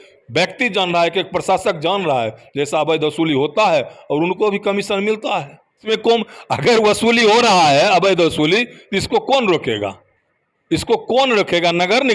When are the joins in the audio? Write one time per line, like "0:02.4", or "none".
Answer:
0:05.8